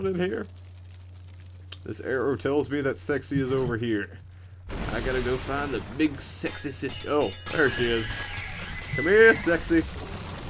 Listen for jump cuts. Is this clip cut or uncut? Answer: cut